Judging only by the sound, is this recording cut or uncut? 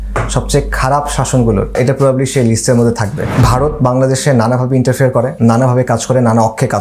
cut